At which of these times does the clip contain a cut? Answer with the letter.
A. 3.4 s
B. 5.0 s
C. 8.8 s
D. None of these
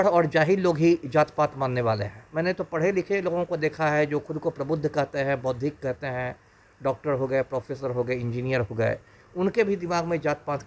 D